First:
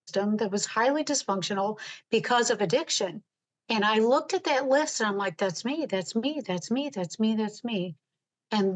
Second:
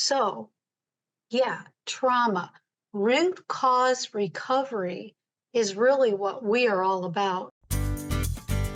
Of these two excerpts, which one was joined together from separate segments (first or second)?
second